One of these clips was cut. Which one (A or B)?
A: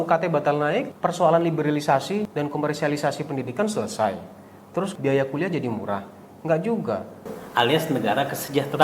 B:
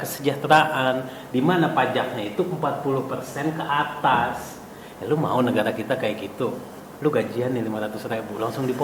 A